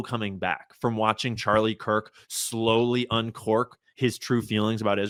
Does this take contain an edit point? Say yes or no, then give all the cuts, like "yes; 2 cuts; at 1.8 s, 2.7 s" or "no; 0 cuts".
no; 0 cuts